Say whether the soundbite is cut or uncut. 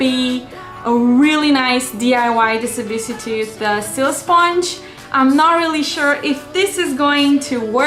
uncut